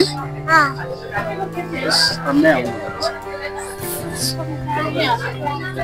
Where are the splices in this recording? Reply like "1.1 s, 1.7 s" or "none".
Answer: none